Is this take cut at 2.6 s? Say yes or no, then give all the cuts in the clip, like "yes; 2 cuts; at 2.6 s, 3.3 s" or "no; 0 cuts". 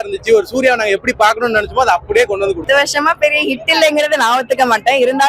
yes; 1 cut; at 2.6 s